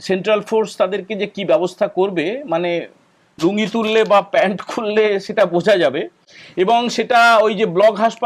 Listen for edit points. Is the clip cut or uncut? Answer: uncut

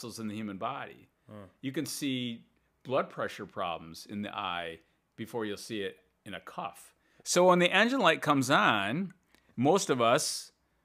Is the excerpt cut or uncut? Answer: cut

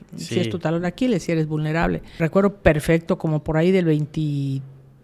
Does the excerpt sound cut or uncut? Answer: cut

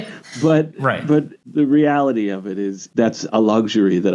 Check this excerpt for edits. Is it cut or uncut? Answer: cut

